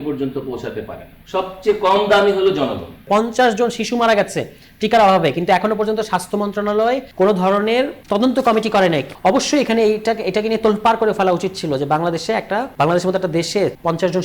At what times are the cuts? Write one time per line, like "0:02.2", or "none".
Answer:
0:03.1
0:09.1